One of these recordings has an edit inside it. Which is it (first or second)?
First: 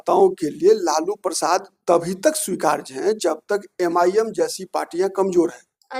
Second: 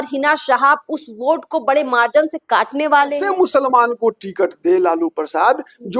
second